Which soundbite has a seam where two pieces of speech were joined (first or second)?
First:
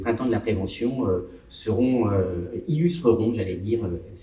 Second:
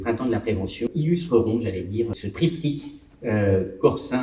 second